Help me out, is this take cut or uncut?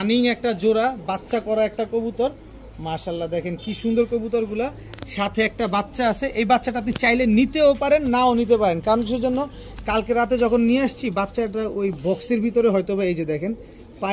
uncut